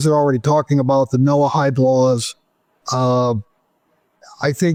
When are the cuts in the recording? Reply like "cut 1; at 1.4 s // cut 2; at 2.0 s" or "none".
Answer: none

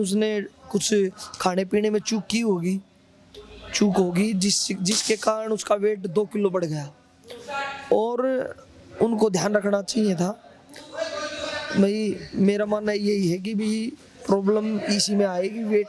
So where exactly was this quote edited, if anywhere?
none

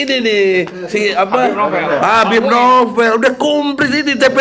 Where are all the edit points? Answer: none

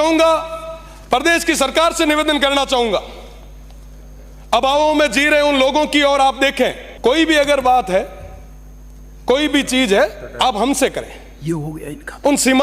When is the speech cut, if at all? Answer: cut 1; at 6.9 s

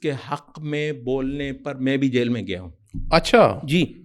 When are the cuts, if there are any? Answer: none

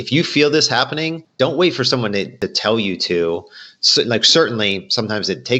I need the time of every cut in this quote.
cut 1; at 1.2 s // cut 2; at 2.3 s

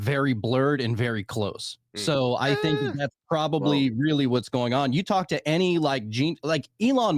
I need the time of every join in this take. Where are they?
none

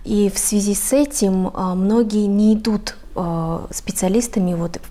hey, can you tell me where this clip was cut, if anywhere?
none

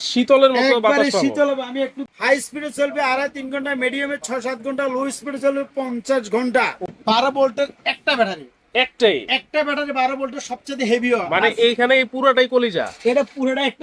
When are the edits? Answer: cut 1; at 2.0 s // cut 2; at 6.8 s

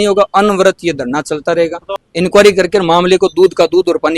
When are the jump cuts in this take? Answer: cut 1; at 2.0 s

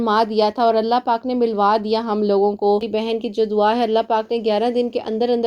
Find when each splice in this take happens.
cut 1; at 2.8 s

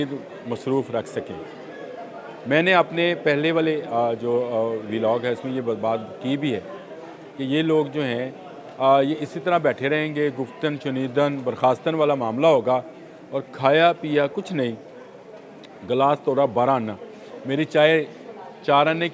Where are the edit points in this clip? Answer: none

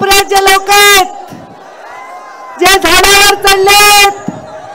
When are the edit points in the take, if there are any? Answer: none

